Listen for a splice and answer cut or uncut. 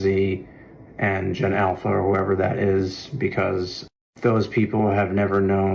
uncut